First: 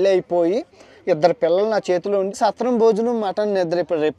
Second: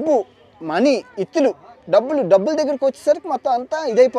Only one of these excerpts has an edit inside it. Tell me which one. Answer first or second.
first